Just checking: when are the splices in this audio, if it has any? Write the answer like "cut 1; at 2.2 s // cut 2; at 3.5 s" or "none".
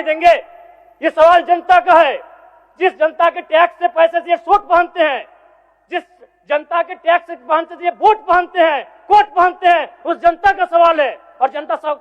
none